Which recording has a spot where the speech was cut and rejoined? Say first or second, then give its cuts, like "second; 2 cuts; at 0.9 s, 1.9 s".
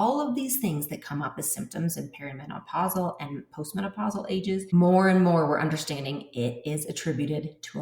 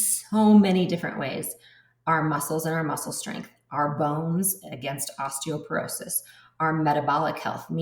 first; 1 cut; at 4.7 s